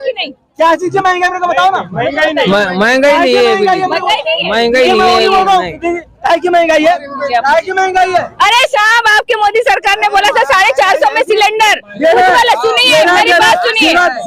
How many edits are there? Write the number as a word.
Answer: one